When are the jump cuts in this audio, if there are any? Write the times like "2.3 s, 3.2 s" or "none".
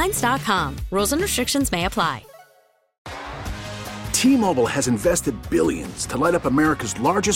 2.9 s